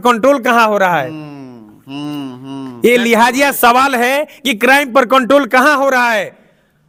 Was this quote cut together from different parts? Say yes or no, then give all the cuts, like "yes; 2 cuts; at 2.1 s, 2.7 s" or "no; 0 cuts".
no; 0 cuts